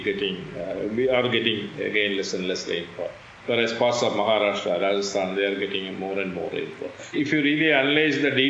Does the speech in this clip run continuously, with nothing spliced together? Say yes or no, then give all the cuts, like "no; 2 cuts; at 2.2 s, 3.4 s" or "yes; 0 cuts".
no; 1 cut; at 7.1 s